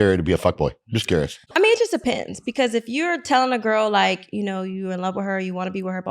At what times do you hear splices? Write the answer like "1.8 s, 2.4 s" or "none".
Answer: 1.5 s